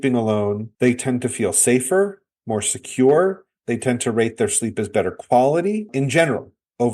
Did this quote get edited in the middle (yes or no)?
no